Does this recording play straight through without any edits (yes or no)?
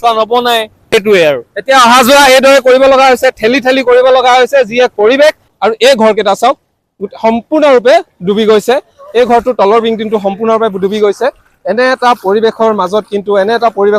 no